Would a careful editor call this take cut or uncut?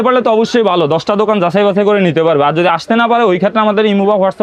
uncut